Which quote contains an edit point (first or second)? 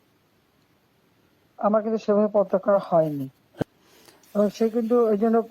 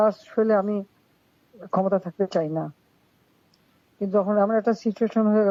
first